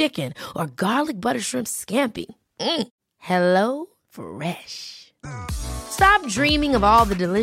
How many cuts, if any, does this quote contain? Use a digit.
0